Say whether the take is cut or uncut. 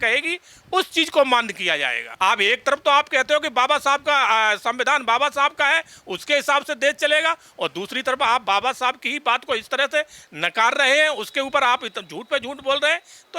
cut